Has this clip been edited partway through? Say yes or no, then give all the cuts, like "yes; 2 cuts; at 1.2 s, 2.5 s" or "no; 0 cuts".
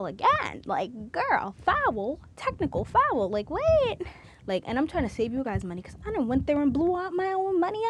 no; 0 cuts